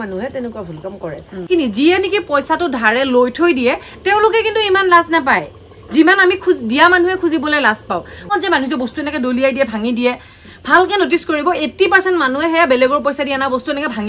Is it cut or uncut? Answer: cut